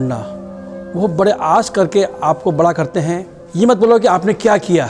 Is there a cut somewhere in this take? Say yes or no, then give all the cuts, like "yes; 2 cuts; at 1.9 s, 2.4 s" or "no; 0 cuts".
yes; 1 cut; at 3.4 s